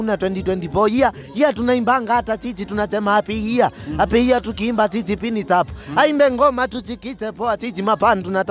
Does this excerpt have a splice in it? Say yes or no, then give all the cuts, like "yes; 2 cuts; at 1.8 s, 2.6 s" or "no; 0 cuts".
no; 0 cuts